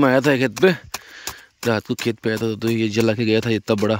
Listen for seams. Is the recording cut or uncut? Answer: uncut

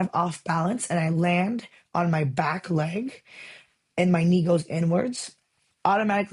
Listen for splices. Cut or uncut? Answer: uncut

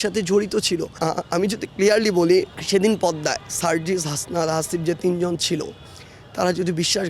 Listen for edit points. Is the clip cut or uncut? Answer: cut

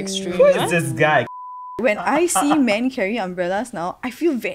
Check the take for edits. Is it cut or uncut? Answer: cut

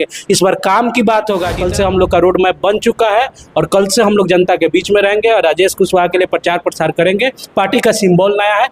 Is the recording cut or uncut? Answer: cut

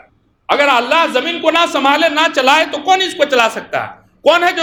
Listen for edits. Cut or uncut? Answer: uncut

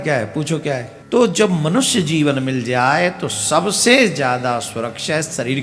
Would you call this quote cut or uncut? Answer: cut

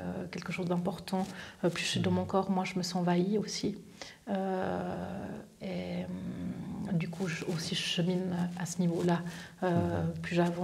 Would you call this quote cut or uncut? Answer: uncut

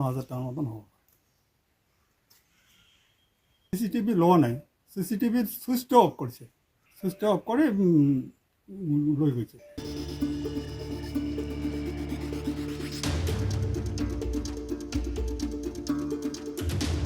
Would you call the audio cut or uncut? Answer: cut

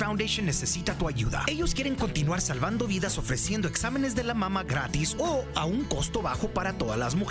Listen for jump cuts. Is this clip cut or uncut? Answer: uncut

